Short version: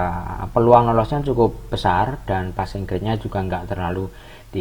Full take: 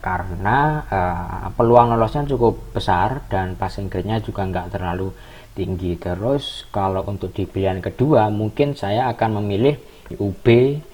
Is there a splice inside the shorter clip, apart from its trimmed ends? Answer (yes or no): no